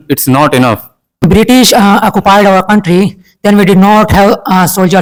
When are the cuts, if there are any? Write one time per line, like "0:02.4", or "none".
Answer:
none